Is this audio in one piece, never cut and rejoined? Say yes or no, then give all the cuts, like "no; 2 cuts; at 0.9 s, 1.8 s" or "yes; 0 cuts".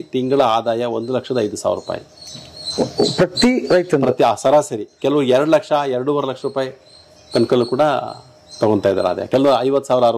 yes; 0 cuts